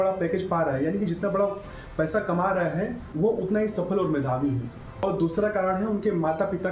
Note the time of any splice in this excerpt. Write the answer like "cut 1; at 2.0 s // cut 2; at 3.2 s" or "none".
cut 1; at 4.8 s